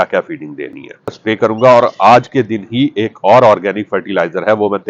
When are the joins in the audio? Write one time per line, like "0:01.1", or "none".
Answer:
0:01.2